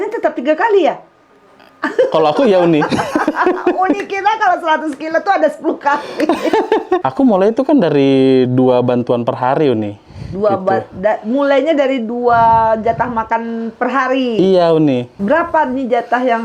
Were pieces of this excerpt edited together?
yes; 2 cuts; at 7.0 s, 15.1 s

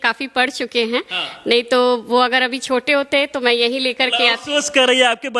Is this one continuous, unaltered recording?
yes; 0 cuts

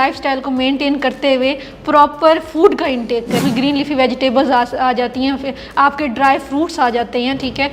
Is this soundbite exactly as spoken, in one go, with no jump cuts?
no; 1 cut; at 3.4 s

